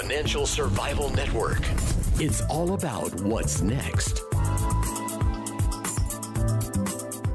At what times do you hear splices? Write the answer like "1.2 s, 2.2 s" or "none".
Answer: none